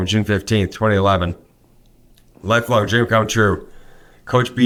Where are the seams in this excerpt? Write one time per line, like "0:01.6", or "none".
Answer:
none

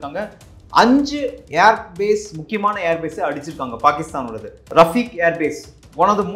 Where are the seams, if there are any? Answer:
0:04.6

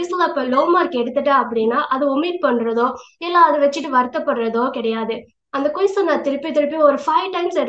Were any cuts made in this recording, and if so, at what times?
none

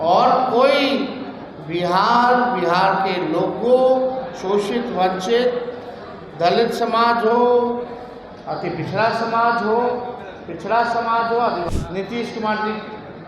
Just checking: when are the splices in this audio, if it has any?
0:11.7

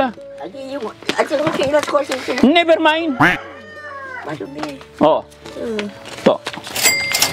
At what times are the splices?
none

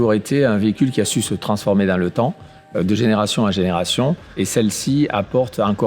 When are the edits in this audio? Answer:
none

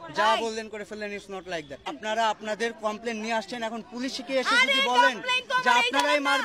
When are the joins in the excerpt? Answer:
0:02.0

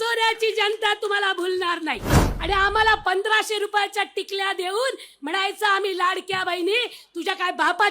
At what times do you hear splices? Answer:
0:02.3

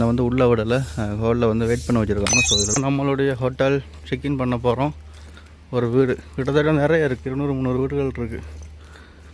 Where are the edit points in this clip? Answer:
0:02.7

